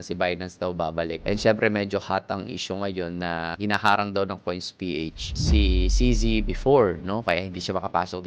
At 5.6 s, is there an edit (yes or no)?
no